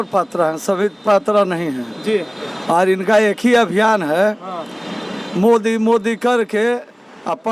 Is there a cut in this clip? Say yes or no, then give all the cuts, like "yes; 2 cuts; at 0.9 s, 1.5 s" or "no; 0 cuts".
no; 0 cuts